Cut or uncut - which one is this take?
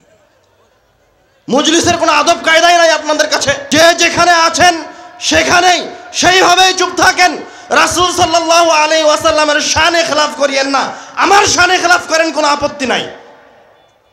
cut